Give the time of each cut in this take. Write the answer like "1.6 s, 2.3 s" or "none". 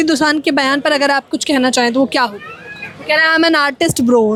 none